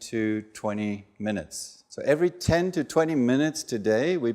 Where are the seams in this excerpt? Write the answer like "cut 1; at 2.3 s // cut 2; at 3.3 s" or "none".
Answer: cut 1; at 2.0 s